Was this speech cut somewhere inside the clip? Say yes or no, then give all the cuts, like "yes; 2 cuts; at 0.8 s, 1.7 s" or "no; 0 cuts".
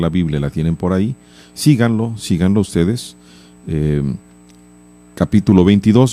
no; 0 cuts